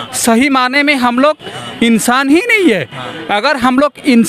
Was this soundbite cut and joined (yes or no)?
no